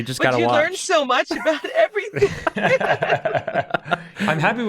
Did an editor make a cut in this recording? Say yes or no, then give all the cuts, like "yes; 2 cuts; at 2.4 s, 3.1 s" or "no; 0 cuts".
no; 0 cuts